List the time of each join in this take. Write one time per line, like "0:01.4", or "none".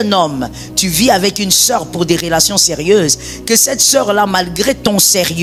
none